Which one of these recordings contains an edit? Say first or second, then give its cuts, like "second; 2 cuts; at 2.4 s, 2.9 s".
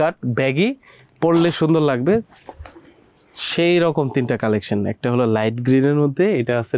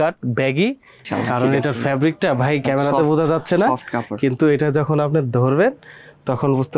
second; 1 cut; at 1.1 s